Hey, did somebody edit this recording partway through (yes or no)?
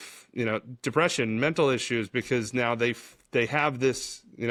no